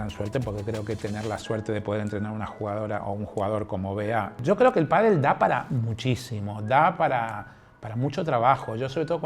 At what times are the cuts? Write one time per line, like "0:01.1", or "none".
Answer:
0:04.3